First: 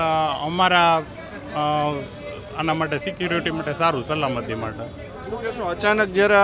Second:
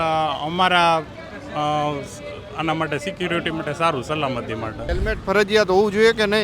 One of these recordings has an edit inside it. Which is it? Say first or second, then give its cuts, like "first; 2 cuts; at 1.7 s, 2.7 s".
second; 1 cut; at 4.9 s